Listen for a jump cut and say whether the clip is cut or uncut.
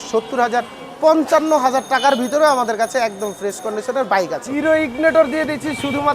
cut